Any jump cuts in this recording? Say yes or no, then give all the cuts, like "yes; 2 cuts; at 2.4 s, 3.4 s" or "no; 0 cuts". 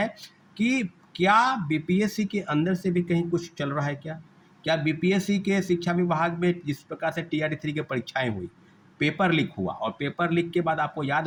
no; 0 cuts